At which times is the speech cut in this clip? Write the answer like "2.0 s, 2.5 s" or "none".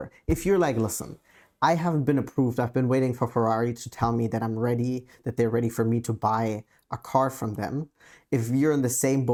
none